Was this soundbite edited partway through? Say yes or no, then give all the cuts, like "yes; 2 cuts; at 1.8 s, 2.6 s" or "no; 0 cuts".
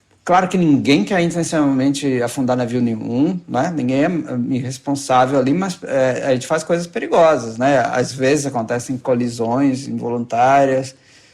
yes; 1 cut; at 9.0 s